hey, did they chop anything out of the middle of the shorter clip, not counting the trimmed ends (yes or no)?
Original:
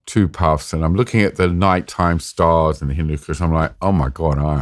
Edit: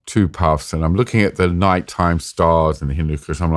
no